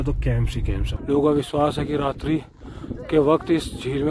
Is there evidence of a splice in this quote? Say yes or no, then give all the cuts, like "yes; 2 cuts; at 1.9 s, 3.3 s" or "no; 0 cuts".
yes; 1 cut; at 0.9 s